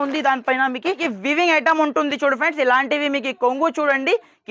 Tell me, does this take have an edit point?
yes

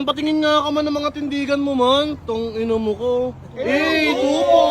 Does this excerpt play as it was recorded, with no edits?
yes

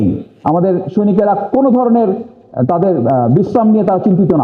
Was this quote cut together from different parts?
no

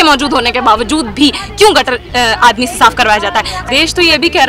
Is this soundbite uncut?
no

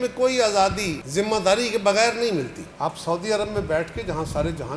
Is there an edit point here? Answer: yes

